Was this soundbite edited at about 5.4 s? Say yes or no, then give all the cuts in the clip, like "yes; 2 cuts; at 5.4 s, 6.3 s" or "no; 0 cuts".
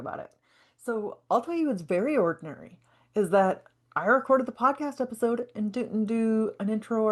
no; 0 cuts